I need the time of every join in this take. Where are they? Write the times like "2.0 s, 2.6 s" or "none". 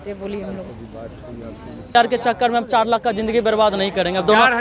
2.0 s